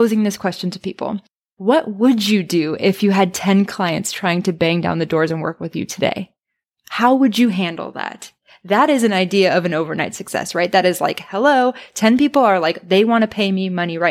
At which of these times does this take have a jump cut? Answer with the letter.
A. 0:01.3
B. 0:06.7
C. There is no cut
C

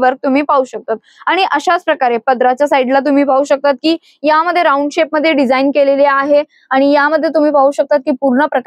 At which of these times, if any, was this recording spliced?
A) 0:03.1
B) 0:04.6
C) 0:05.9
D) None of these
D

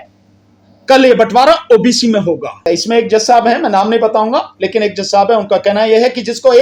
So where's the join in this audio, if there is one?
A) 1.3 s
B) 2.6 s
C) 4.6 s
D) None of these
B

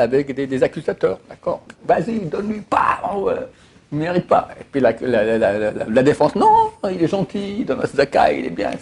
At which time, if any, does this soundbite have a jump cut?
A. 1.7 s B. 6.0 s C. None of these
A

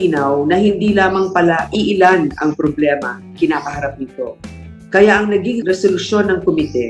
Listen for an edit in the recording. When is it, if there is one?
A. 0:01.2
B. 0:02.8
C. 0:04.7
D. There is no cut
D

